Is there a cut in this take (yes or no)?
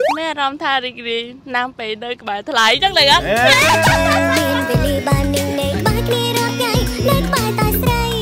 no